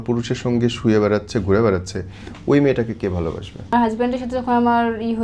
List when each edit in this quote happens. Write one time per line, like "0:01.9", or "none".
0:03.7